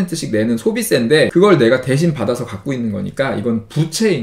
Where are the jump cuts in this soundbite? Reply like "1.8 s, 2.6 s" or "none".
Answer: 1.3 s